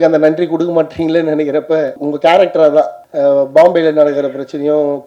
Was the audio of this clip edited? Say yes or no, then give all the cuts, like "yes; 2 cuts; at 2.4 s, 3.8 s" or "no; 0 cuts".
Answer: yes; 2 cuts; at 2.0 s, 3.0 s